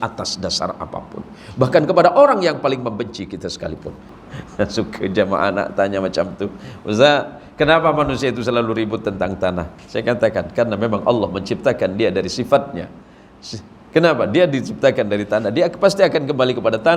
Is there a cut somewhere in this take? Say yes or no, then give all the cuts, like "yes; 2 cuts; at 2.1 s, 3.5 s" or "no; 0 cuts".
yes; 1 cut; at 4.1 s